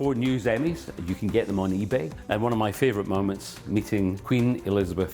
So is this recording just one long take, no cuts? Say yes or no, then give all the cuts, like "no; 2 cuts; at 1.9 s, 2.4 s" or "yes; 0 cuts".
no; 2 cuts; at 2.2 s, 4.2 s